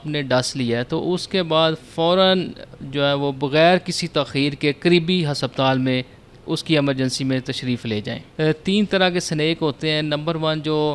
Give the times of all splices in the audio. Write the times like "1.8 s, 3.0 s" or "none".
8.2 s